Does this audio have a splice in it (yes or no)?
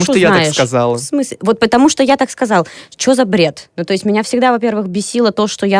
no